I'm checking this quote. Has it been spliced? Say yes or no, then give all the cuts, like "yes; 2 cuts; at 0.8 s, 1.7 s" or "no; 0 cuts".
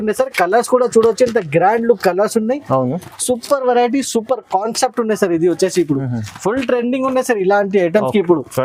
no; 0 cuts